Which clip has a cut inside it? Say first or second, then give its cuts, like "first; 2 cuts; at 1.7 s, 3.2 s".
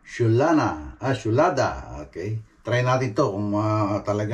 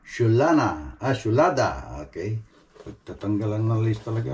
second; 1 cut; at 2.5 s